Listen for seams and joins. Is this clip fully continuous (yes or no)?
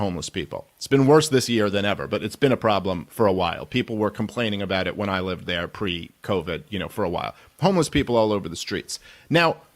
no